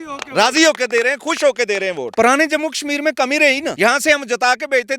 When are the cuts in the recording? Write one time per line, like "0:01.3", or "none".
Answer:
0:02.0
0:03.7

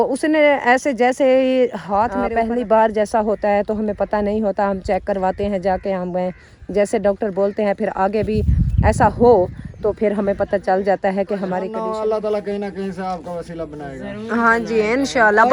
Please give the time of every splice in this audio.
0:02.2
0:11.7

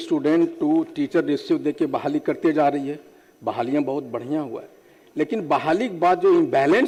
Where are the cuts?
none

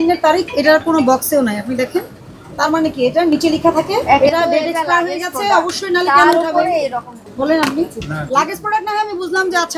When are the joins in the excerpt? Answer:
none

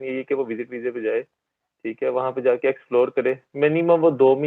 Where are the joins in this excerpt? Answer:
none

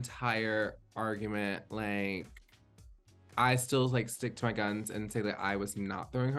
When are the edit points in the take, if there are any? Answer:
none

